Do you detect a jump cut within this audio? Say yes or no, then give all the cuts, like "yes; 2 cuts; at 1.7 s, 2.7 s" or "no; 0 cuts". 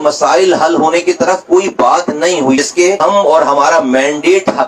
yes; 1 cut; at 2.6 s